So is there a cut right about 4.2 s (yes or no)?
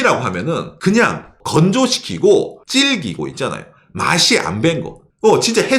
no